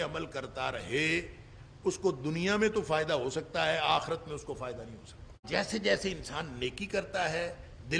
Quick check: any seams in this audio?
yes; 1 cut; at 5.4 s

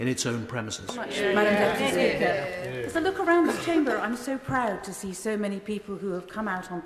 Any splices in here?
yes; 1 cut; at 1.1 s

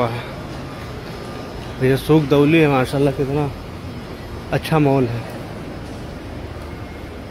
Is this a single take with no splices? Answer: yes; 0 cuts

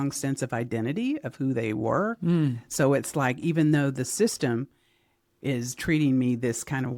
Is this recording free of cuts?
yes; 0 cuts

